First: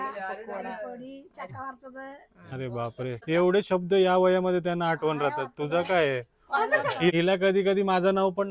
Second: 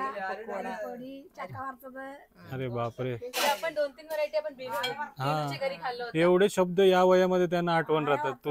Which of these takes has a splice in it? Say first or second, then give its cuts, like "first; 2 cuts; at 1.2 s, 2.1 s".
first; 2 cuts; at 3.2 s, 7.1 s